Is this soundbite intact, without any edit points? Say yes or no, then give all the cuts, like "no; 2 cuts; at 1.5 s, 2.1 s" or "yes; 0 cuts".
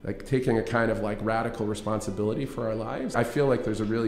no; 1 cut; at 3.1 s